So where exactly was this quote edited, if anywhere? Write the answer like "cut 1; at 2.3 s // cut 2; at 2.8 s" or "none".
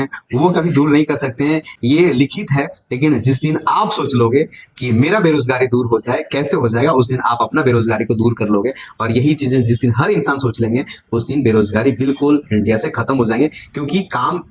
none